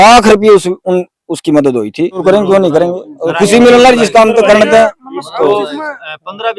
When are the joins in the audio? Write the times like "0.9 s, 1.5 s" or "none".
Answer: 2.2 s